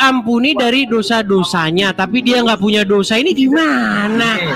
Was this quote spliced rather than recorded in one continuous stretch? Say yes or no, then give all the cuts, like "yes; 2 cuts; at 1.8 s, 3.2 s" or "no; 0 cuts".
no; 0 cuts